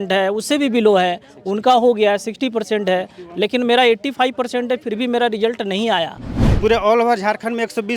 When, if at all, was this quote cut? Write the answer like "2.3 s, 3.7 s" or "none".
6.4 s

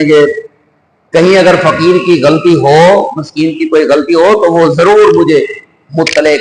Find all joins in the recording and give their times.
none

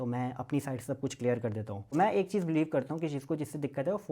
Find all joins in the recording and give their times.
1.9 s

